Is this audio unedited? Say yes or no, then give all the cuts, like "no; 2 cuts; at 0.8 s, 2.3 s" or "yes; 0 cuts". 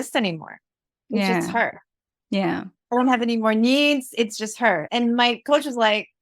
no; 1 cut; at 4.9 s